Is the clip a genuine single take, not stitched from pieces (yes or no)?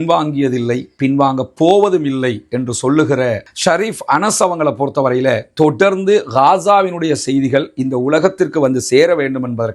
no